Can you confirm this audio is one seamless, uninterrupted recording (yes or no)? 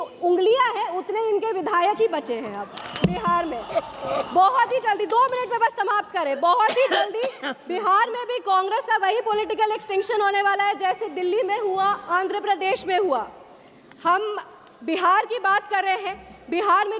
yes